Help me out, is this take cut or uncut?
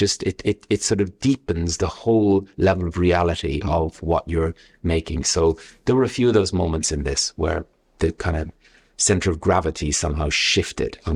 uncut